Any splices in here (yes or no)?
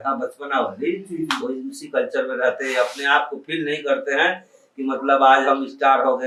no